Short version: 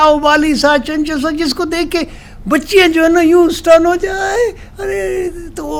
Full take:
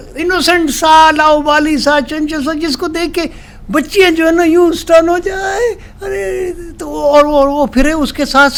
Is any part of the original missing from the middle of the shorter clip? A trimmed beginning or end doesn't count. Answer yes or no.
no